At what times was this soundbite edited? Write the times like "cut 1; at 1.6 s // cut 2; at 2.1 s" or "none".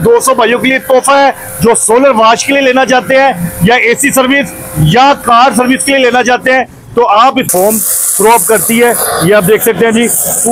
cut 1; at 7.5 s